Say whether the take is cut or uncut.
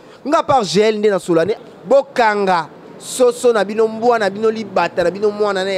cut